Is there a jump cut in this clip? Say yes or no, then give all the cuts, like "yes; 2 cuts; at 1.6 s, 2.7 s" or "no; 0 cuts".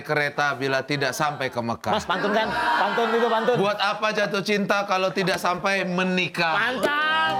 no; 0 cuts